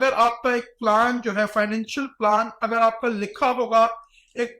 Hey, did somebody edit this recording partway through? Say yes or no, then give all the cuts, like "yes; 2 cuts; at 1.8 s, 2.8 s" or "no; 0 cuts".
no; 0 cuts